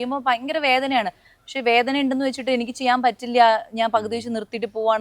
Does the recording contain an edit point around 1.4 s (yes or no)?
no